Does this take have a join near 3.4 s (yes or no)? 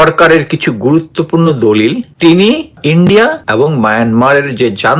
yes